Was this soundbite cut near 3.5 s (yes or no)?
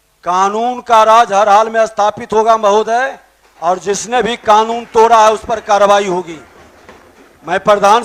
no